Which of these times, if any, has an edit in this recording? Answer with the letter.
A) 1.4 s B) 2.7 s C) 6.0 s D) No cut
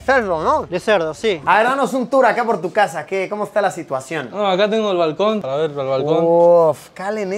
A